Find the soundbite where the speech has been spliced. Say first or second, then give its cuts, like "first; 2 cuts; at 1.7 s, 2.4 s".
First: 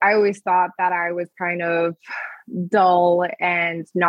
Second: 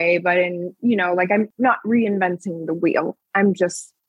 second; 1 cut; at 1.5 s